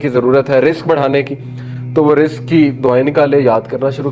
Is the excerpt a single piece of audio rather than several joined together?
yes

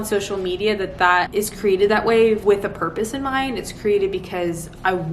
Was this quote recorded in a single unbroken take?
no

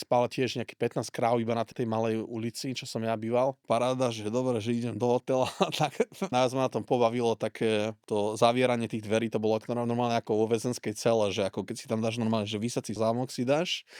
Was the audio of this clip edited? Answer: yes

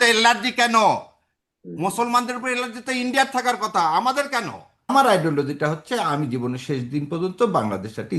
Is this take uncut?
no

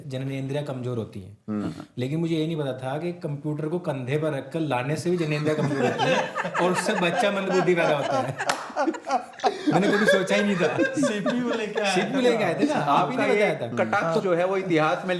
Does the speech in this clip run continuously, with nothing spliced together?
yes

